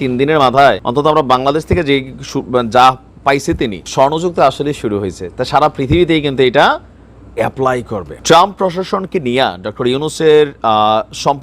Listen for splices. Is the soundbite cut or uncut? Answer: cut